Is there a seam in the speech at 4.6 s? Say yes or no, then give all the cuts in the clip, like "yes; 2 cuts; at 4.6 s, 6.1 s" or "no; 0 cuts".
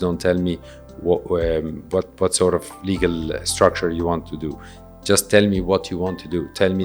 no; 0 cuts